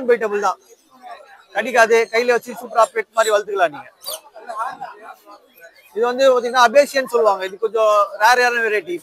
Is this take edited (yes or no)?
no